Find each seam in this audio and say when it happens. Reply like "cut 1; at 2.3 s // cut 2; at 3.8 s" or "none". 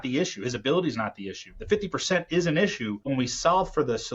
cut 1; at 3.1 s